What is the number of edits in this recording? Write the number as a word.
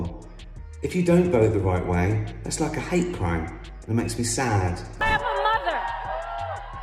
one